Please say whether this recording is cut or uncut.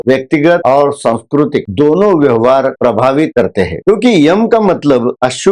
uncut